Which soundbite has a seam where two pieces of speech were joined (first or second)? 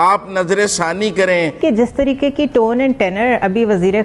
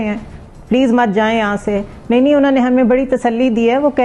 first